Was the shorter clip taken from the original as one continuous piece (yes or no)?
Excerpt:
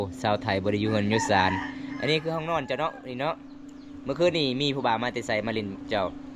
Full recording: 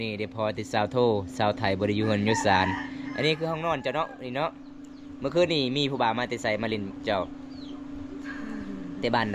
yes